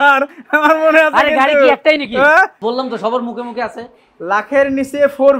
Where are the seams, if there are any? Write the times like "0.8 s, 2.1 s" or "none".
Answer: 2.6 s